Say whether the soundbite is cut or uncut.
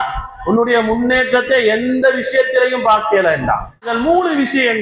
cut